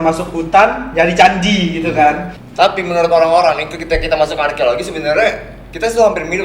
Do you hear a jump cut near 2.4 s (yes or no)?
yes